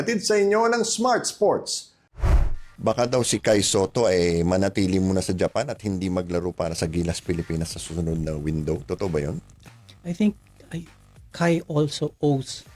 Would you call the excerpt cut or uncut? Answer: cut